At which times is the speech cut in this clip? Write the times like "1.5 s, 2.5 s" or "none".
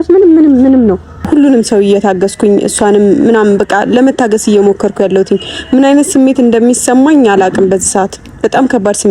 1.3 s